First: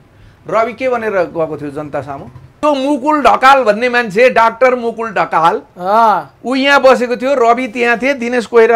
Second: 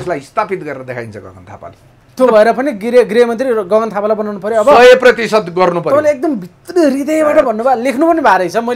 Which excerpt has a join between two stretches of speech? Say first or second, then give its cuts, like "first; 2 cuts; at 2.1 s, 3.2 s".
first; 1 cut; at 2.6 s